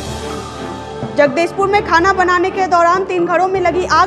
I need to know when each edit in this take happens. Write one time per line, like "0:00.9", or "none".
0:01.1